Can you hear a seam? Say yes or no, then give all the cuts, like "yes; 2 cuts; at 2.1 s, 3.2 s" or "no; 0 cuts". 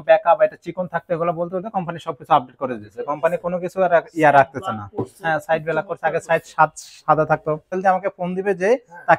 yes; 1 cut; at 7.8 s